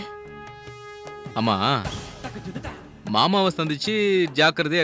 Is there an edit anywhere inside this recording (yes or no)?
no